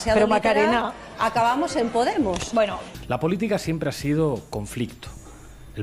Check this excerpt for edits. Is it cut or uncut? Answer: cut